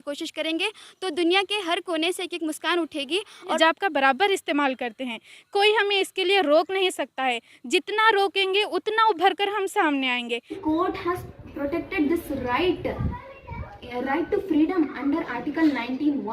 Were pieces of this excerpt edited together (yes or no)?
yes